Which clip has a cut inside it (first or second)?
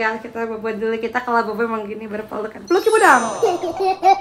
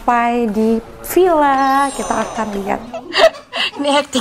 second